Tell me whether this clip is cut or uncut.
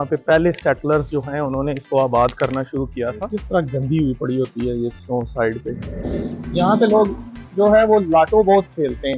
cut